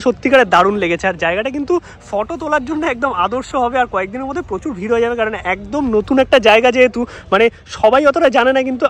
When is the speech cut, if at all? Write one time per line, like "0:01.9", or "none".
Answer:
none